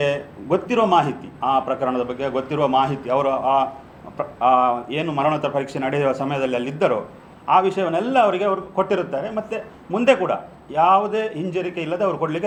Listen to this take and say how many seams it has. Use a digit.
0